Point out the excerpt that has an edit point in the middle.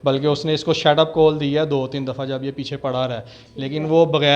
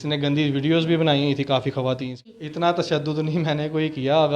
second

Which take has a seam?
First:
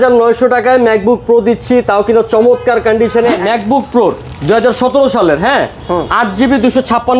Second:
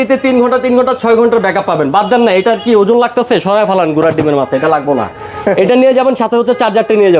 first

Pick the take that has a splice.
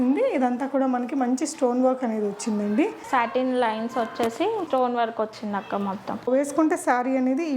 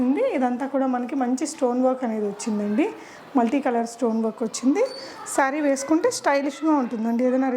first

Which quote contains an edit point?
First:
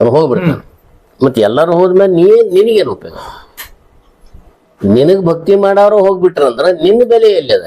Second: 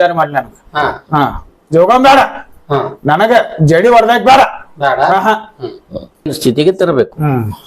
second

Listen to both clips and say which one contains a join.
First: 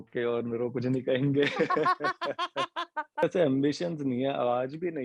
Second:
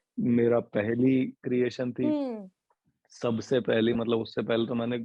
first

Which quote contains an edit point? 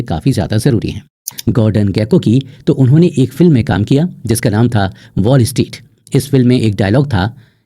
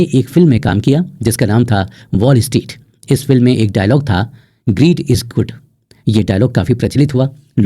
first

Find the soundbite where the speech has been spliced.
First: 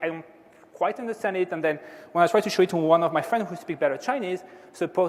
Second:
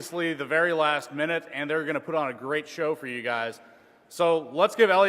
second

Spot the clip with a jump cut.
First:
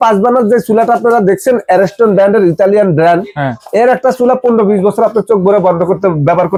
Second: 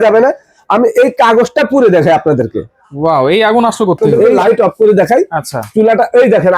second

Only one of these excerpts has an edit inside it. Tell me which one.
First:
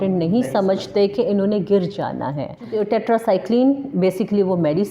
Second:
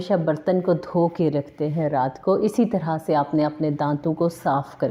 first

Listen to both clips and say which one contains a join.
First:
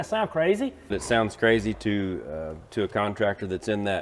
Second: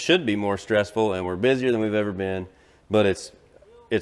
first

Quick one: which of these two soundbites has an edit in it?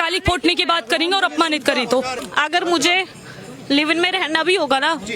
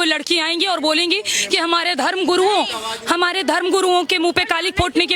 first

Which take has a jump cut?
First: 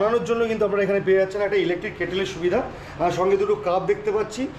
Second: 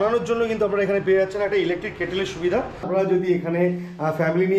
second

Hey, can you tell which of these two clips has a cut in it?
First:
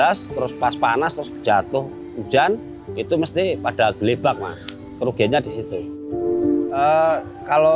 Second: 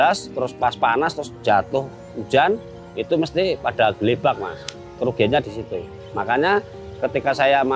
first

